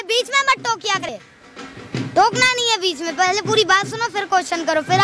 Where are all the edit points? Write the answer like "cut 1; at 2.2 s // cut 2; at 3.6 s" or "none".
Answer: cut 1; at 1.1 s